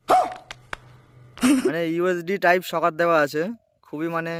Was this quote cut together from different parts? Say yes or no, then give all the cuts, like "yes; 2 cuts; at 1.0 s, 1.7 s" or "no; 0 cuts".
no; 0 cuts